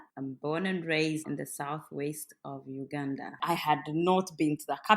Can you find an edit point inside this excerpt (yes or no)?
yes